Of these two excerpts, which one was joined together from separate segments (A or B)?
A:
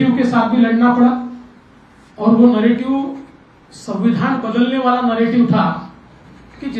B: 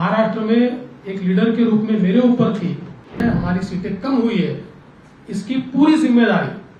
B